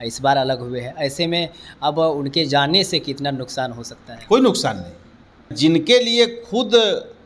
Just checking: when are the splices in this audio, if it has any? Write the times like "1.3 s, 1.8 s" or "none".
5.5 s